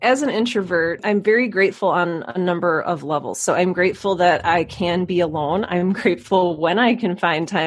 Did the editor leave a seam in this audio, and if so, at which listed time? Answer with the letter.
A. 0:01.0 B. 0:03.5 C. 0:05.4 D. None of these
A